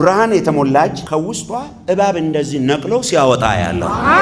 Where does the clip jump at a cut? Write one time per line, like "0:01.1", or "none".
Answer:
0:01.0